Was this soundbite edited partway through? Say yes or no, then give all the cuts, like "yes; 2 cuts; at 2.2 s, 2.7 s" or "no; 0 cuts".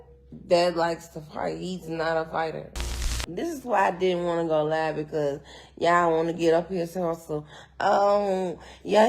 yes; 1 cut; at 3.2 s